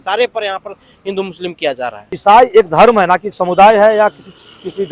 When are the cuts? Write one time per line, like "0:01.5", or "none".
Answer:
0:02.1